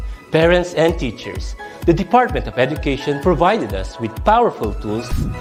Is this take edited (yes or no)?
no